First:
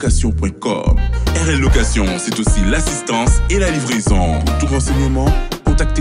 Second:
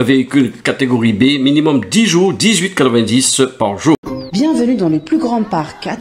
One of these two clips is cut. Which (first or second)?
second